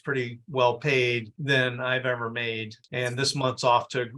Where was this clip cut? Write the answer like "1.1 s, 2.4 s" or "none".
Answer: 2.8 s